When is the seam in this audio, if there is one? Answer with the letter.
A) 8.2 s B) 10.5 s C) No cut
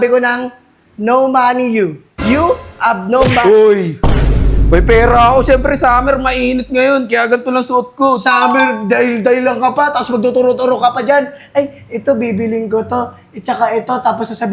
C